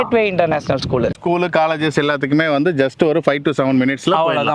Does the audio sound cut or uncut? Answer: cut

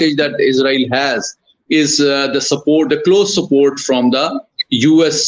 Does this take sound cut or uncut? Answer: uncut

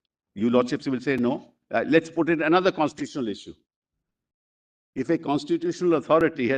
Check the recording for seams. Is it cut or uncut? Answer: uncut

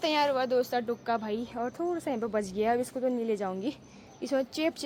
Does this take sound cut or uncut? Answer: uncut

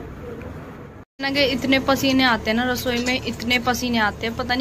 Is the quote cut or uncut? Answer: cut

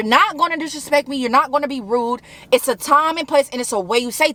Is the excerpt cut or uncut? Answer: uncut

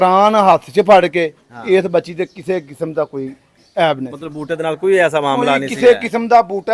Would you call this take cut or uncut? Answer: uncut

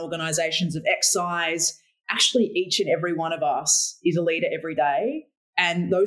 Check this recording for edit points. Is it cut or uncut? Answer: uncut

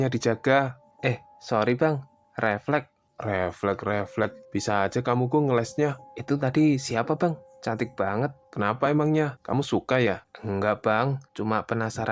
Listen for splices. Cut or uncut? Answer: uncut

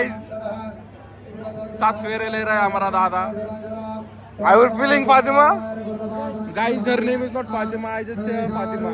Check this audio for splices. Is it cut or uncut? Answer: uncut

